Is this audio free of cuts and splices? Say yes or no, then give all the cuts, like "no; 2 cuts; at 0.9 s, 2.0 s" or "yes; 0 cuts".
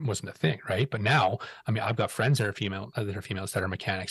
yes; 0 cuts